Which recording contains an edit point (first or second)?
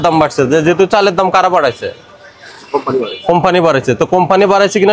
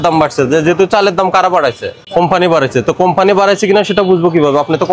second